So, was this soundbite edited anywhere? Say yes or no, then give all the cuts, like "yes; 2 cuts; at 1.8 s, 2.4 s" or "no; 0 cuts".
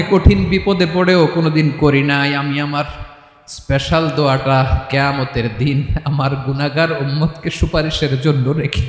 no; 0 cuts